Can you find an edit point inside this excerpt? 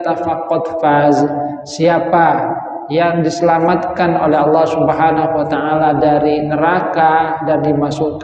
no; 0 cuts

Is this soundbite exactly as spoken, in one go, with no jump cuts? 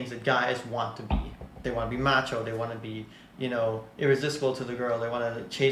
yes; 0 cuts

